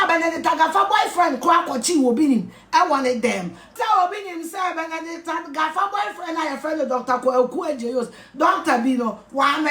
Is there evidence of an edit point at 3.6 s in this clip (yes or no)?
yes